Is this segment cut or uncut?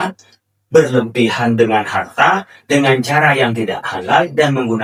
uncut